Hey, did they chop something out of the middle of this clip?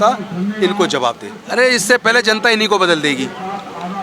yes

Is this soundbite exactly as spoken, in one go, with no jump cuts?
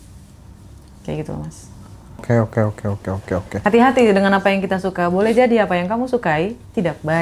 no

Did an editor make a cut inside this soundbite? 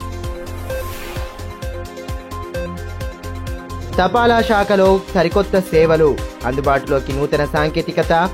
no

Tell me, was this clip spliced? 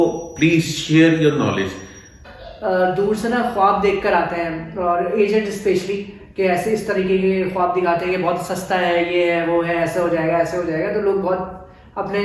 yes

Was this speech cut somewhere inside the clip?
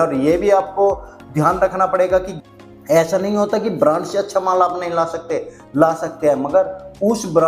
yes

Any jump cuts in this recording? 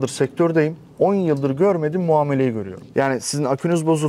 yes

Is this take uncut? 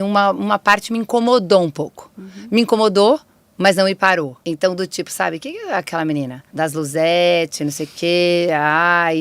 no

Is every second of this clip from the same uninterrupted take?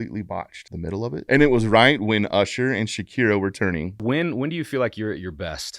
no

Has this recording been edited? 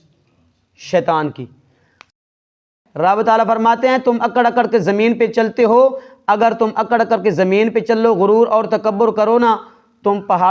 yes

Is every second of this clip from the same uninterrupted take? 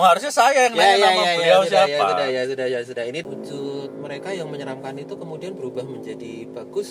no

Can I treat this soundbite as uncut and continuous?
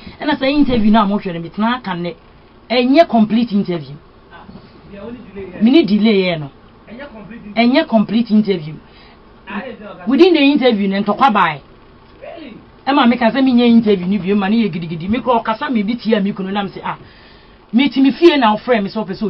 yes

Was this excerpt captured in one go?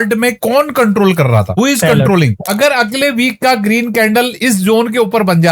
no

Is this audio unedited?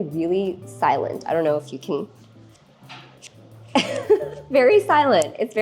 no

